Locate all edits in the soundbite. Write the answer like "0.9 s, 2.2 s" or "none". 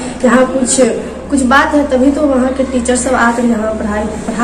none